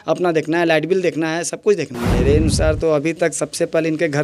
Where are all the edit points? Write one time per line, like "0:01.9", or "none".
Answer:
0:02.0